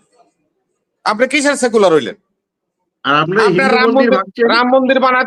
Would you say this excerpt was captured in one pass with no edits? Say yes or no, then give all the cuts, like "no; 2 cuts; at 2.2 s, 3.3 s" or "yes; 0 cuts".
yes; 0 cuts